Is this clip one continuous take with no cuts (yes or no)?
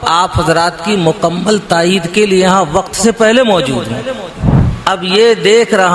no